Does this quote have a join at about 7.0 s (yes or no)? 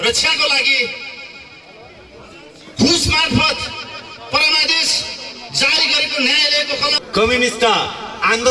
yes